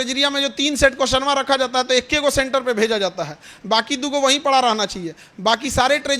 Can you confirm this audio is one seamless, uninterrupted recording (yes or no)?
yes